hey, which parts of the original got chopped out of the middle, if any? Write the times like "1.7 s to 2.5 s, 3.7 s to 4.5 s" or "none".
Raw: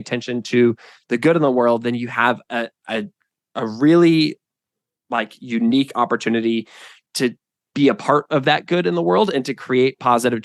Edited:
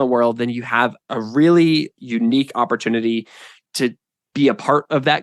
2.4 s to 3.4 s, 4.4 s to 5.4 s